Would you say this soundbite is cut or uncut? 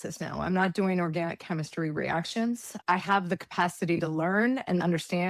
uncut